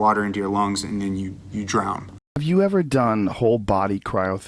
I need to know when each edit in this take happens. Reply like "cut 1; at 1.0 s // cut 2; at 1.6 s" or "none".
cut 1; at 2.2 s